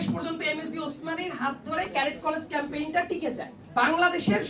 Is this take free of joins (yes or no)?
no